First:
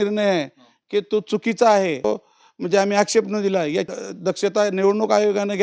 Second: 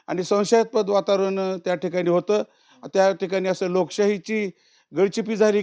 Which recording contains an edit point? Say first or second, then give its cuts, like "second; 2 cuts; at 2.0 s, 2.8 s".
first; 2 cuts; at 2.0 s, 4.0 s